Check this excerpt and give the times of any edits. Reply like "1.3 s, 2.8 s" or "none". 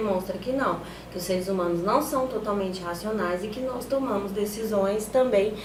none